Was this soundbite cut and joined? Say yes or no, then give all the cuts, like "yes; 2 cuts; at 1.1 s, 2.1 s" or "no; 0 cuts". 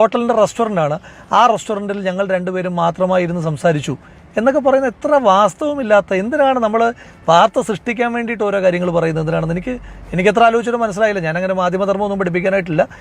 no; 0 cuts